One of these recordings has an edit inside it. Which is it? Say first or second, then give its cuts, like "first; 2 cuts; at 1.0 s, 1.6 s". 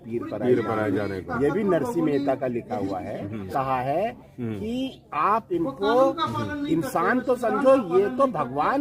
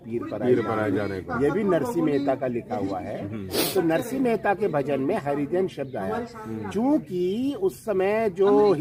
first; 1 cut; at 3.5 s